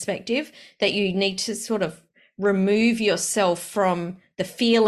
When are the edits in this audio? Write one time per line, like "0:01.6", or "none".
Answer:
none